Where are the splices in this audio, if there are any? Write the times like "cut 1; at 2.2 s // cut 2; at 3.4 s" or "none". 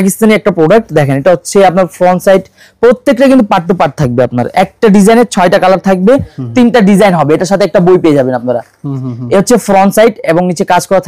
none

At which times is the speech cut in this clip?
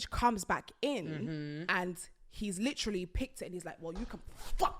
cut 1; at 1.6 s

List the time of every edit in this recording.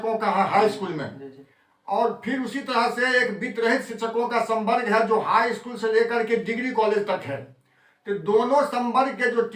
none

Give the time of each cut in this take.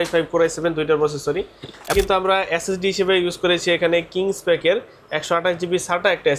cut 1; at 1.9 s

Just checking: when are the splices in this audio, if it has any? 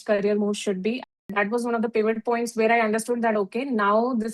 cut 1; at 1.1 s

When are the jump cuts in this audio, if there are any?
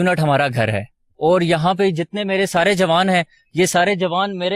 none

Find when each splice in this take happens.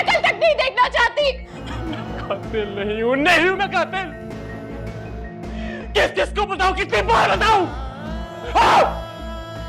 cut 1; at 1.6 s

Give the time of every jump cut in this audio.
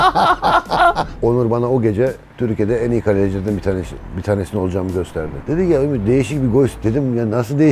cut 1; at 1.1 s // cut 2; at 2.3 s // cut 3; at 5.3 s

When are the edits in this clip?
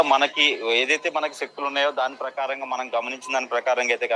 none

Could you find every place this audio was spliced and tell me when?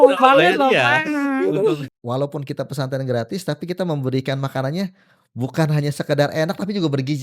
cut 1; at 1.9 s

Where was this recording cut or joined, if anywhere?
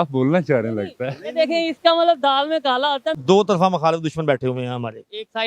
cut 1; at 3.2 s

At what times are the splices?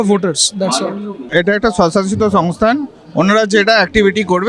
cut 1; at 1.2 s

